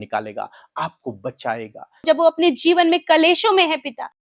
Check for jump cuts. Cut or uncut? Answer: cut